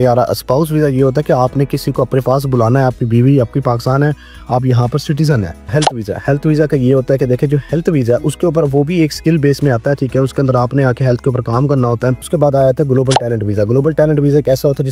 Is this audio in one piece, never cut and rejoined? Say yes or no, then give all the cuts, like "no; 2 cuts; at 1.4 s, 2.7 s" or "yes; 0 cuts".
no; 2 cuts; at 5.7 s, 12.3 s